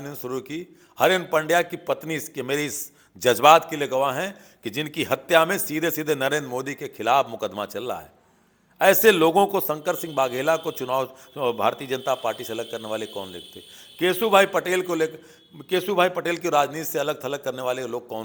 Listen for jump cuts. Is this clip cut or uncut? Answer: uncut